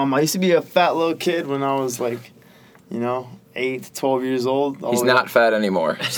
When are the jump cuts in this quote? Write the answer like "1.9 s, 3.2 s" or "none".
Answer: none